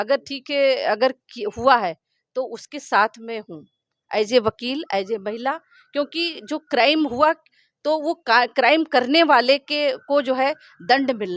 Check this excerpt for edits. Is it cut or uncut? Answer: uncut